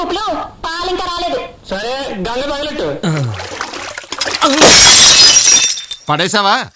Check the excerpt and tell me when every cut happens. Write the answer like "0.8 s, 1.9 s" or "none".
3.0 s